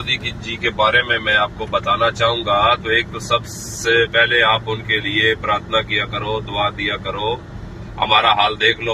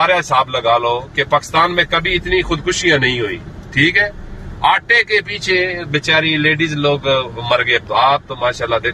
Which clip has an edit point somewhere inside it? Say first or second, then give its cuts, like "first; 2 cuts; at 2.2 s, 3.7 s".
second; 1 cut; at 7.8 s